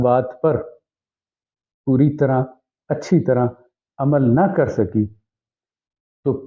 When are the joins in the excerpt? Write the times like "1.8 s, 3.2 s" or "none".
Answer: none